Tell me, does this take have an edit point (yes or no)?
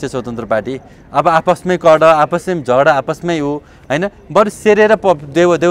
no